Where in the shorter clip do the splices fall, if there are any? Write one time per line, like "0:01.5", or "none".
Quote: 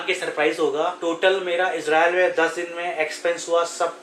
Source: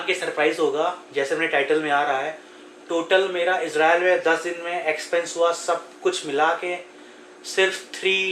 0:01.0